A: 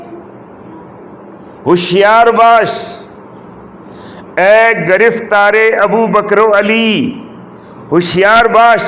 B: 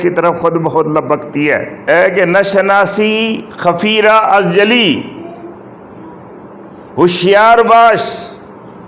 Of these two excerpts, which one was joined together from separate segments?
B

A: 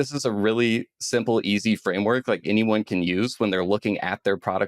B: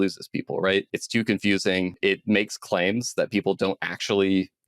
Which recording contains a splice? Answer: B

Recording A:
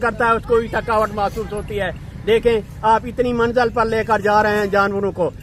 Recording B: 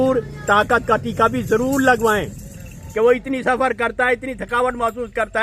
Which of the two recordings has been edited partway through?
B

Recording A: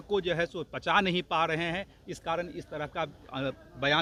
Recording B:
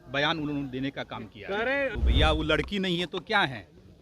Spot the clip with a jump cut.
B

